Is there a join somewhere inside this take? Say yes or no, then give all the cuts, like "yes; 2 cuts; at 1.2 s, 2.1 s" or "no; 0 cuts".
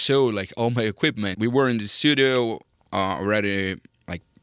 yes; 1 cut; at 1.3 s